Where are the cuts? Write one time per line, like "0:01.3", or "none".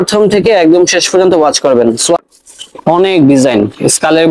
0:02.2